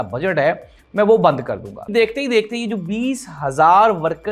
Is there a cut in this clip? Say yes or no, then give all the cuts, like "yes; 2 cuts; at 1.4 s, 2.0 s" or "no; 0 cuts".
yes; 1 cut; at 1.8 s